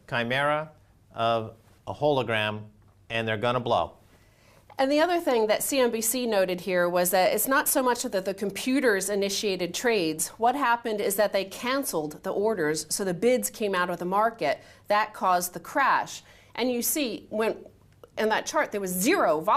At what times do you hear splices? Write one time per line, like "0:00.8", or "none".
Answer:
0:06.6